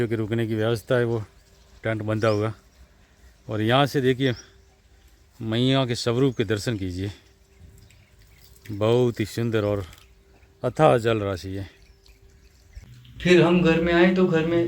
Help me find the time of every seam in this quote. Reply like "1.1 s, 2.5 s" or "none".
12.8 s